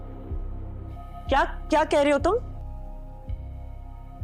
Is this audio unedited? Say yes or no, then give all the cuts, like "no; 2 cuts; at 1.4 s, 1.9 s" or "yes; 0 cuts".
yes; 0 cuts